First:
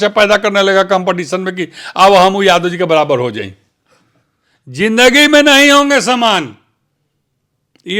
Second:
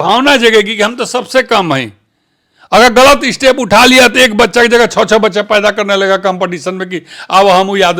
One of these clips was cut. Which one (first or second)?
first